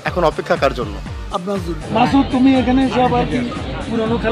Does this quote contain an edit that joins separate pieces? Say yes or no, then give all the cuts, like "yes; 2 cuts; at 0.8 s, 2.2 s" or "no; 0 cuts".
yes; 1 cut; at 1.8 s